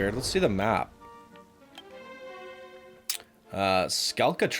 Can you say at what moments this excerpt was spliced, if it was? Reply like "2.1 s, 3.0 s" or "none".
none